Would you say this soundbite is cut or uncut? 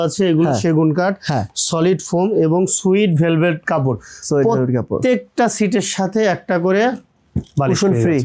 uncut